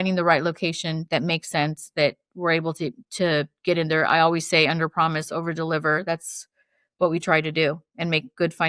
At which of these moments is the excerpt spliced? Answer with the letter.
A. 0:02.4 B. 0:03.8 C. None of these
C